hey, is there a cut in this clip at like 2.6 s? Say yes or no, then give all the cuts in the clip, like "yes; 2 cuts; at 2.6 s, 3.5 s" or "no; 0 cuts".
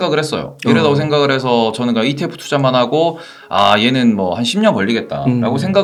no; 0 cuts